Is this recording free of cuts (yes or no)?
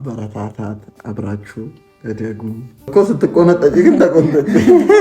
no